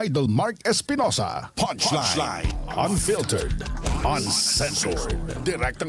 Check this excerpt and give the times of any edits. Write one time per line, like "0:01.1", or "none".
0:02.4